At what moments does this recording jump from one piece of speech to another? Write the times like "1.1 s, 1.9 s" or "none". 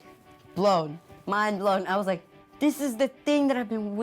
none